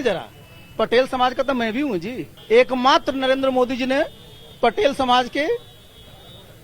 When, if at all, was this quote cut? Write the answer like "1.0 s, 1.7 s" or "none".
2.3 s

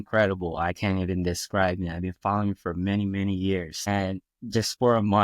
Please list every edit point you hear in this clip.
3.9 s

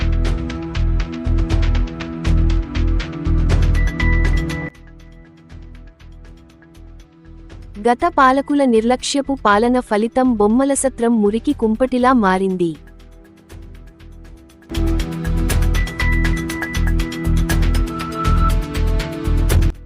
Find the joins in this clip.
1.7 s

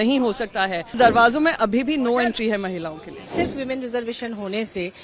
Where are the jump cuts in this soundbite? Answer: 1.0 s, 3.3 s

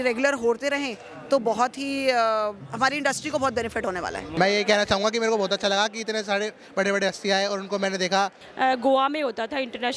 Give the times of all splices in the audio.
4.3 s, 8.4 s

